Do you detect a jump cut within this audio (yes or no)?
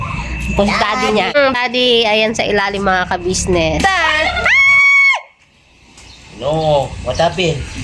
yes